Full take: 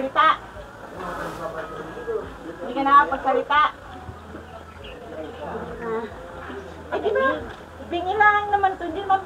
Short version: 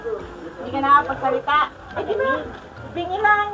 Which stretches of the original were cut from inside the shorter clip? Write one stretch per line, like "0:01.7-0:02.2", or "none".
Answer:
0:03.8-0:06.8

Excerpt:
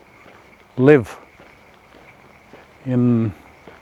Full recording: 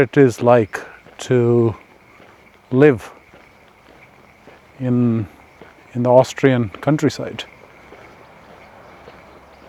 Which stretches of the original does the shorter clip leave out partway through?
none

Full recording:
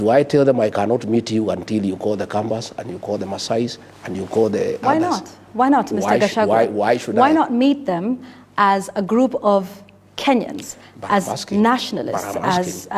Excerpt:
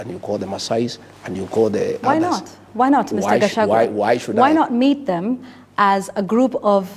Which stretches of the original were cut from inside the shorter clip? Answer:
none

